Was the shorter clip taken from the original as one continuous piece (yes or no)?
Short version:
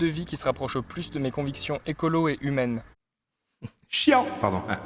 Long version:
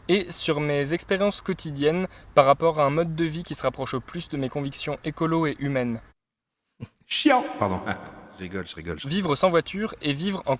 yes